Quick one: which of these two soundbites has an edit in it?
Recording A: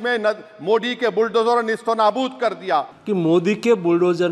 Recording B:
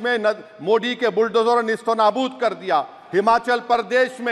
A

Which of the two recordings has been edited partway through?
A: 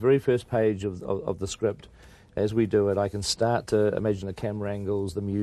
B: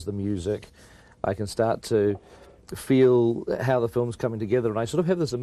A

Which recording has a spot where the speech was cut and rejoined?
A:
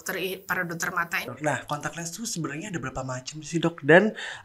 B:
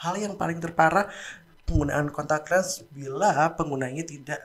A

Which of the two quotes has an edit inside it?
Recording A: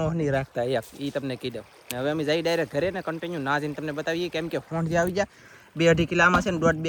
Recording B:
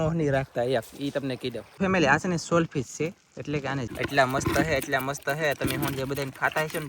B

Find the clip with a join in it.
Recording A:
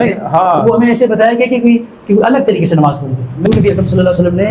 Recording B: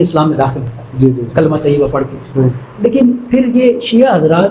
A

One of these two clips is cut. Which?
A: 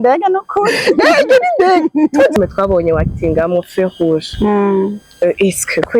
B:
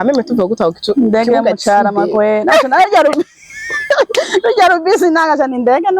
A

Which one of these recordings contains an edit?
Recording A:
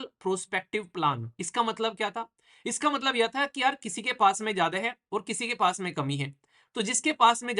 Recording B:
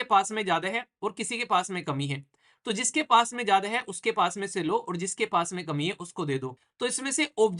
B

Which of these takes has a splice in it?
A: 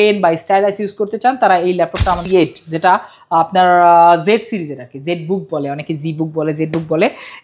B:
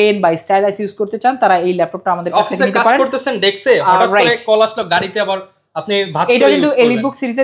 A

